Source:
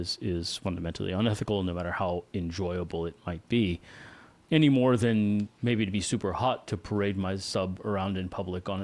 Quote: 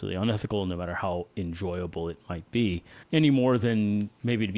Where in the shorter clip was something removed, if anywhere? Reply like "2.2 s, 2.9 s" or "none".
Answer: 2.9 s